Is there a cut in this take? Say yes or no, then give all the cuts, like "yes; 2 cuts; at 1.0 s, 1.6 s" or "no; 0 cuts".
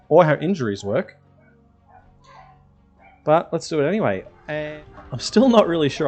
yes; 1 cut; at 4.4 s